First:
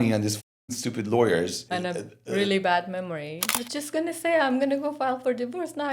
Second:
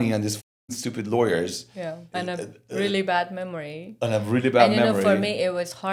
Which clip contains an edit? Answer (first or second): first